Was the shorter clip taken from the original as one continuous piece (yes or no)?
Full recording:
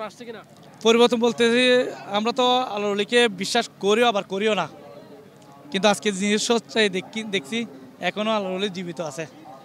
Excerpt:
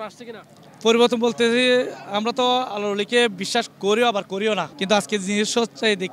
no